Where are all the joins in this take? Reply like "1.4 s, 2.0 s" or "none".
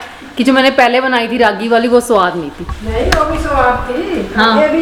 none